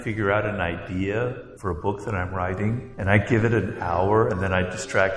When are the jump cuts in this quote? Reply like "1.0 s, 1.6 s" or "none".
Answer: 1.5 s, 2.9 s